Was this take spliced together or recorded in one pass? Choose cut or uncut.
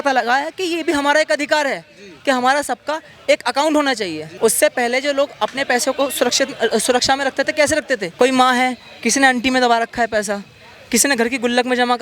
uncut